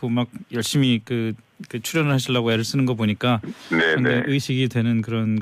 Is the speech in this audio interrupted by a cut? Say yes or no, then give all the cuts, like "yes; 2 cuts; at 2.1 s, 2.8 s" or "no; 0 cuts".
yes; 1 cut; at 4.5 s